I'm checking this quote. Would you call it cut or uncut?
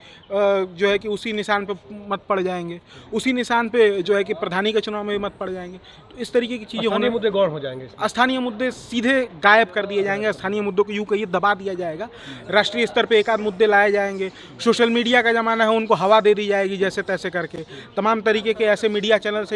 uncut